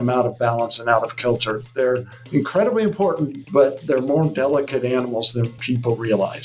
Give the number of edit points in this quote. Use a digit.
2